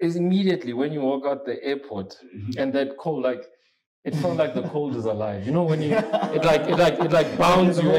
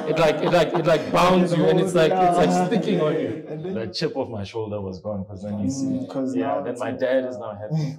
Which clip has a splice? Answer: second; 1 cut; at 3.5 s

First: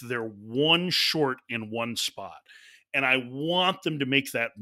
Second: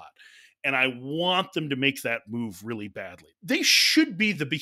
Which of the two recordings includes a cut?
second; 1 cut; at 3.3 s

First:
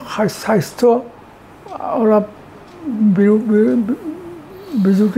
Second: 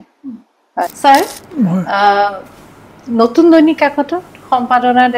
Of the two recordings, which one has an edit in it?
second; 1 cut; at 0.9 s

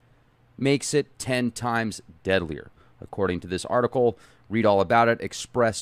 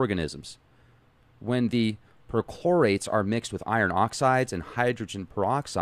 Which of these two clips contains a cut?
first; 1 cut; at 0.9 s

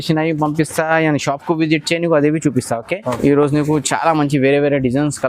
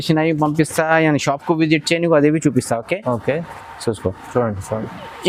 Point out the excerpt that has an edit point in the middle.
first; 1 cut; at 3.2 s

